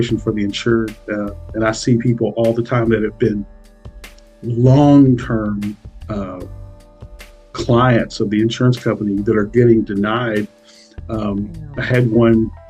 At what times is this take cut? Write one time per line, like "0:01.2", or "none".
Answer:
none